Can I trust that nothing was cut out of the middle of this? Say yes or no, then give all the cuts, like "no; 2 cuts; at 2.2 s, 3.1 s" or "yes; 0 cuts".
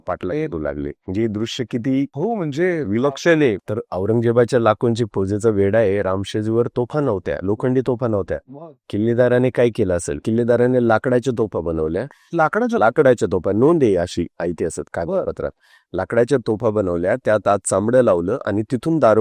no; 3 cuts; at 2.1 s, 3.6 s, 10.2 s